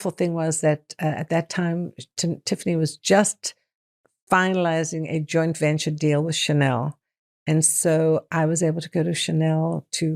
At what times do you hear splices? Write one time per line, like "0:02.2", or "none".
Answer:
none

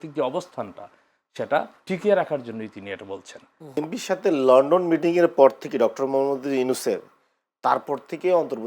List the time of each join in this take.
0:03.8

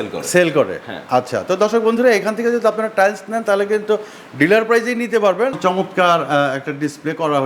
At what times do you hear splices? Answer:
0:05.6

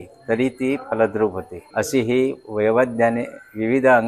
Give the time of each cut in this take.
none

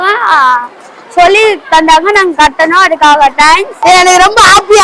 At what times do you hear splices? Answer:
0:03.7

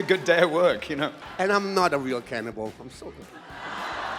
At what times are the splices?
0:01.2

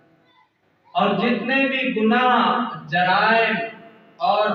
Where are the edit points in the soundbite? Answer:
none

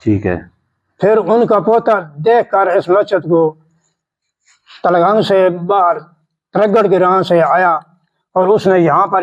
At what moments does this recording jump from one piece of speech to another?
none

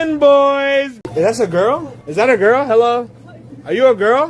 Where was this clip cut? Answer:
0:01.0
0:02.0

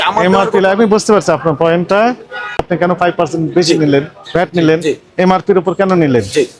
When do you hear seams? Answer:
0:02.6

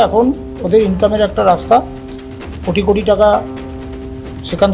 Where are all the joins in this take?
none

